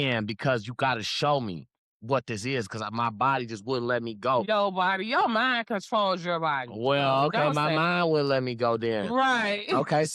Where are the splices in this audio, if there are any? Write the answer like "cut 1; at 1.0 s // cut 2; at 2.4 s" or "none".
none